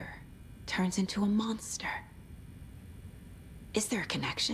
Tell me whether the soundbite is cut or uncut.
cut